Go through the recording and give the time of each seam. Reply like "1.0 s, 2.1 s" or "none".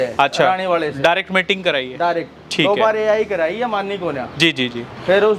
none